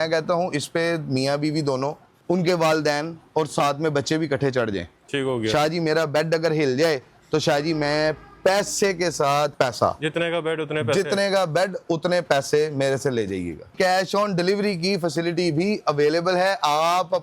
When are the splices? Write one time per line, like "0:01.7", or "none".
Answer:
0:02.1
0:09.5
0:13.7